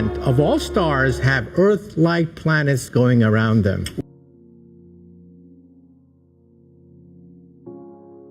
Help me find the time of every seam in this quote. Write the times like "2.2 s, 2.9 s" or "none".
4.0 s